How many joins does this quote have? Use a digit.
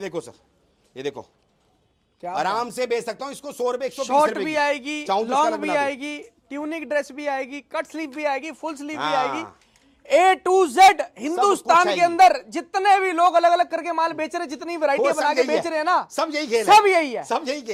0